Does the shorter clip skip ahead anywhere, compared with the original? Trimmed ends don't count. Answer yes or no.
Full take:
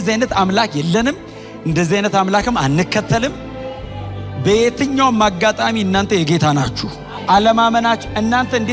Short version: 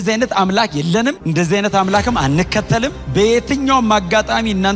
yes